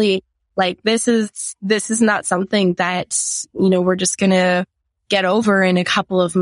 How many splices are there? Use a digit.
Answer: 0